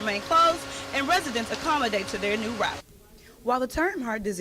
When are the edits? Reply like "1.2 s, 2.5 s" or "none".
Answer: 2.9 s

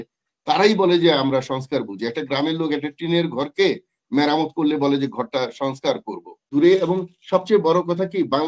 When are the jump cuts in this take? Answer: 6.5 s

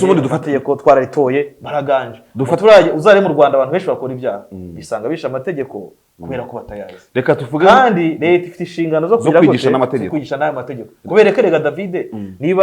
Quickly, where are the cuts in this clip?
none

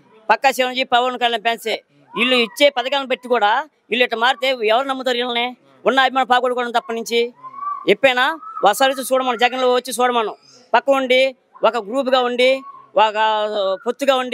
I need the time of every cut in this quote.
none

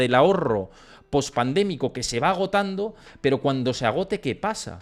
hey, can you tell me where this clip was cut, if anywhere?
none

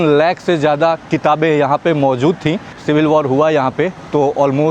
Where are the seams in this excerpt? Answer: 2.7 s

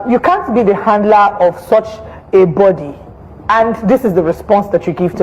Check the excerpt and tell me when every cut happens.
none

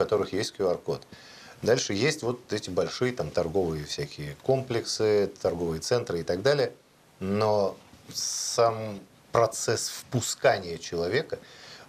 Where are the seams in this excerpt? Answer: none

